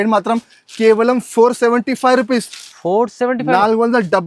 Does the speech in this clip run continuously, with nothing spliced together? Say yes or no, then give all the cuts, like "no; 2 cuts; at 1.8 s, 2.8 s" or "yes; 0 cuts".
yes; 0 cuts